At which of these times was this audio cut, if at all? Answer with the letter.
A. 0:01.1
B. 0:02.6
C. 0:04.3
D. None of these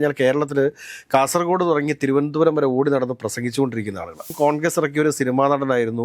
C